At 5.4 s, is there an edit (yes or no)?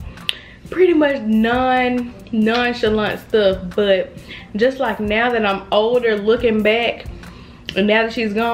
no